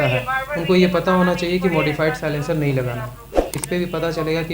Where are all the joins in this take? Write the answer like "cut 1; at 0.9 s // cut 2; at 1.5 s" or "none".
cut 1; at 3.5 s